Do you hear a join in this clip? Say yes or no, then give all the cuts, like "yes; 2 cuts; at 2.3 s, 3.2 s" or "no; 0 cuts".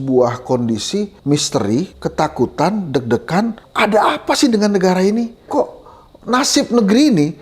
yes; 4 cuts; at 1.2 s, 2.0 s, 3.6 s, 5.5 s